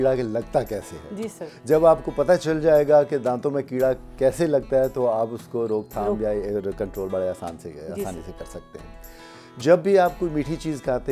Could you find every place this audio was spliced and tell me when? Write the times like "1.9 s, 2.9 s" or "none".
none